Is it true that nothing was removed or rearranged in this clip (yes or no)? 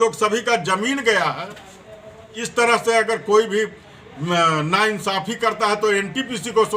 no